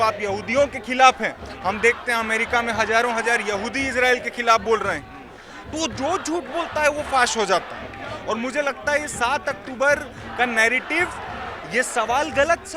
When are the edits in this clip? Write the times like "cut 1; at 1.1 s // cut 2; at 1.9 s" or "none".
none